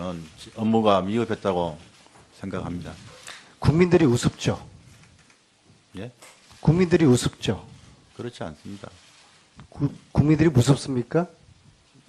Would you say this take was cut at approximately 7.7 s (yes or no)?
yes